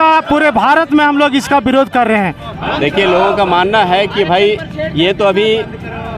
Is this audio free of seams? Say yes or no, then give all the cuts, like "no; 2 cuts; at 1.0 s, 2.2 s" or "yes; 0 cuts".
yes; 0 cuts